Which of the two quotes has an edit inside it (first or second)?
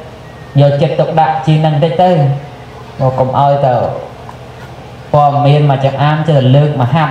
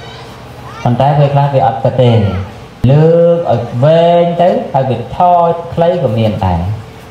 second